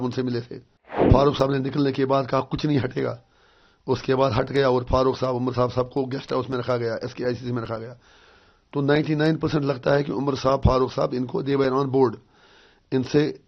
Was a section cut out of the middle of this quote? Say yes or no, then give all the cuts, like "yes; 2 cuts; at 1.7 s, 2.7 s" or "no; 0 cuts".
yes; 1 cut; at 1.1 s